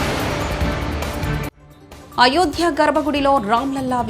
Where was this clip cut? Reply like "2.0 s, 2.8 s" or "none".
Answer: 1.6 s